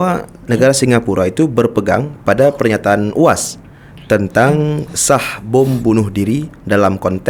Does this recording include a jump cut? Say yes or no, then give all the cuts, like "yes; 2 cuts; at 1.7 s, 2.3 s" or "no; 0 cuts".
no; 0 cuts